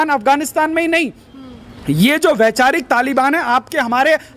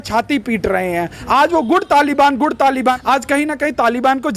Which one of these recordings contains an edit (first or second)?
second